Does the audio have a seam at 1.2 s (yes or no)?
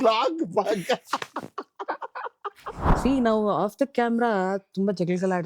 no